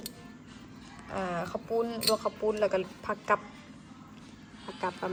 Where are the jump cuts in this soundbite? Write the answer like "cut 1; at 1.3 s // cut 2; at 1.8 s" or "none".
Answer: none